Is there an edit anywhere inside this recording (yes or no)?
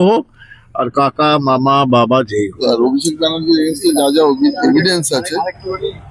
yes